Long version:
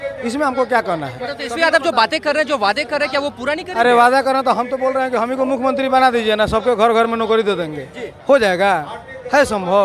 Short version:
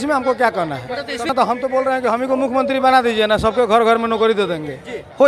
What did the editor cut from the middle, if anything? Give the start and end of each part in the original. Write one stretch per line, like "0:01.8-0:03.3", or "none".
0:01.6-0:04.4